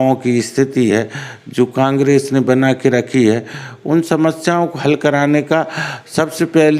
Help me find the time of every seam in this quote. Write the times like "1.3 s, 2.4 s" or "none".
none